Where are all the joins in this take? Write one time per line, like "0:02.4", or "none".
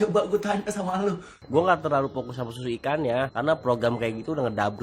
0:01.3